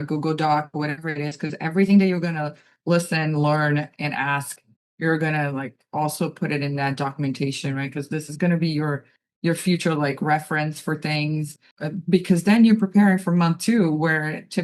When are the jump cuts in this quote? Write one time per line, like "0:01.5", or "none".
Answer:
0:11.6